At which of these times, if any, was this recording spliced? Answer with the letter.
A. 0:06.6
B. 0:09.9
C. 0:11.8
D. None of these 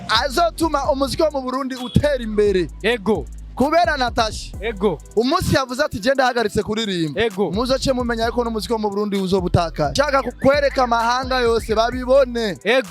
B